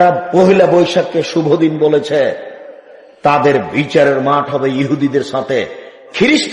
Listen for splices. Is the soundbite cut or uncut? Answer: uncut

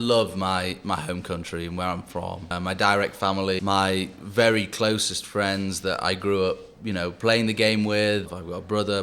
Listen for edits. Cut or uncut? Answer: cut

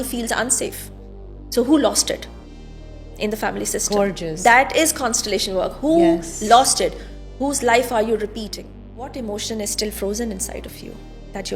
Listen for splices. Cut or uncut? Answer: cut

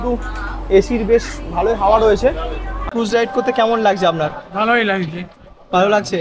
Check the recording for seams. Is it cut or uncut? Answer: cut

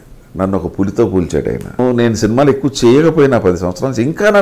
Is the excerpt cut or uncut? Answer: cut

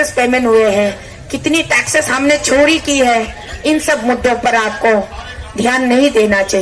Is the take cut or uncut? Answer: uncut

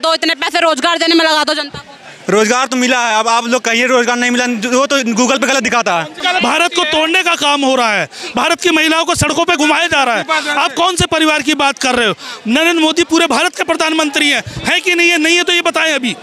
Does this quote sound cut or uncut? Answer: cut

